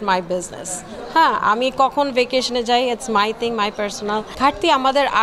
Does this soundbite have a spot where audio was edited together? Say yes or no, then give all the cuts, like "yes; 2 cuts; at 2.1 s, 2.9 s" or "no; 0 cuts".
yes; 1 cut; at 4.3 s